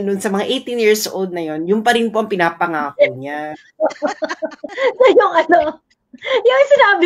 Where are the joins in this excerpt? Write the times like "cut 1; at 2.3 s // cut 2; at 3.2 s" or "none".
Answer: cut 1; at 4.6 s